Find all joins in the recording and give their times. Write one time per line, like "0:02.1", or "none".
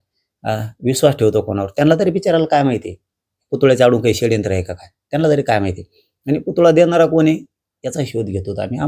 none